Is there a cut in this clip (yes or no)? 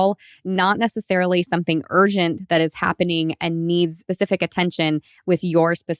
yes